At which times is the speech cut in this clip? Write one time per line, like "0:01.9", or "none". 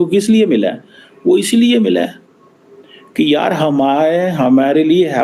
none